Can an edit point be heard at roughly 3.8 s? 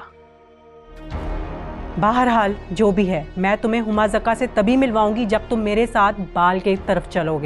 no; 1 cut; at 0.9 s

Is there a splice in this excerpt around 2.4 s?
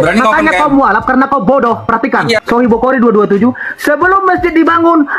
yes; 1 cut; at 2.4 s

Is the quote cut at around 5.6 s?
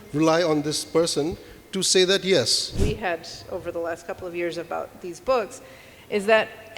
no; 1 cut; at 2.7 s

